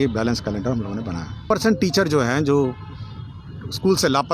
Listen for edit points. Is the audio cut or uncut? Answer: cut